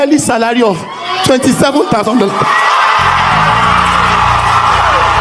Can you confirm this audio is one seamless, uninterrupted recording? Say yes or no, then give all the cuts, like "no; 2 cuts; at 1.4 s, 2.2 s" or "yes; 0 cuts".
yes; 0 cuts